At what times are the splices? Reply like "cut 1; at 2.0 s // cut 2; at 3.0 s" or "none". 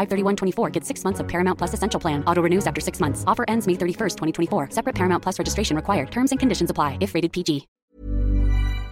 cut 1; at 7.7 s

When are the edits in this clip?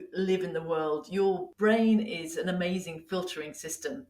cut 1; at 1.5 s

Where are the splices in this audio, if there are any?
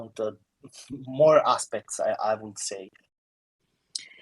cut 1; at 3.2 s

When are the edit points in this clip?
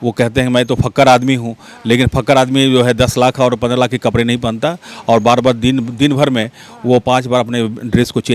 none

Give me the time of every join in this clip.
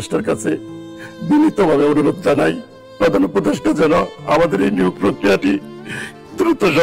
none

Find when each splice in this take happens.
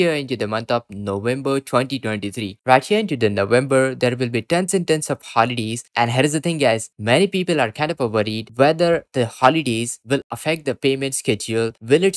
cut 1; at 2.6 s

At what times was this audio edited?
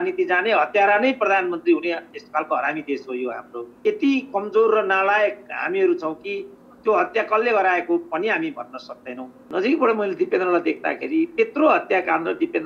cut 1; at 3.8 s // cut 2; at 9.3 s

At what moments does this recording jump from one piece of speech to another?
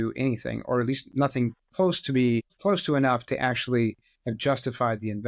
cut 1; at 2.5 s

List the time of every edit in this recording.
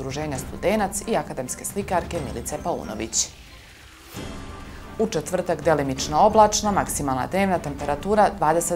cut 1; at 3.2 s // cut 2; at 4.9 s

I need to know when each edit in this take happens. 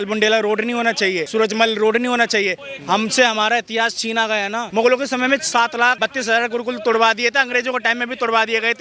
cut 1; at 1.2 s // cut 2; at 2.6 s // cut 3; at 4.6 s // cut 4; at 6.0 s

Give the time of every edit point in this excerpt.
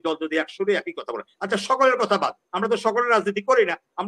none

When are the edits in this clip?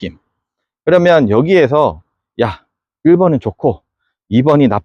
none

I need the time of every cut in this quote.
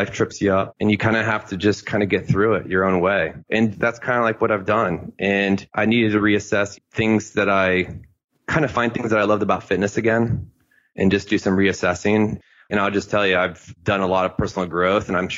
cut 1; at 12.4 s

